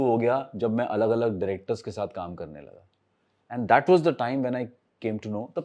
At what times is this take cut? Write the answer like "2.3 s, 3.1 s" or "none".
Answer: none